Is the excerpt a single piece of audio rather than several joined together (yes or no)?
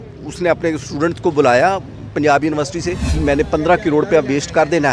no